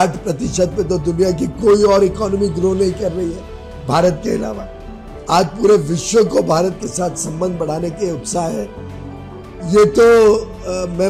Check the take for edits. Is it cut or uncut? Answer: uncut